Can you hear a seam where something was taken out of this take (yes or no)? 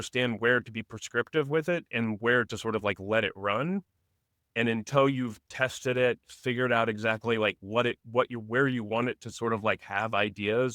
no